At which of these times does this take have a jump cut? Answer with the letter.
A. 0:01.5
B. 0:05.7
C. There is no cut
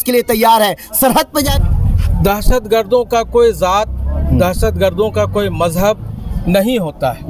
A